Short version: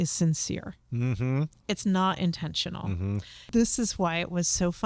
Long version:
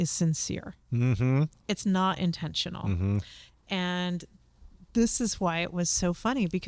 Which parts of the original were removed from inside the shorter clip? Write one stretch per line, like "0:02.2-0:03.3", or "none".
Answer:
0:03.3-0:04.7